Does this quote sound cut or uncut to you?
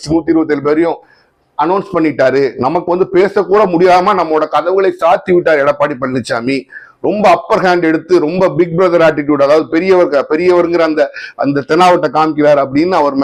uncut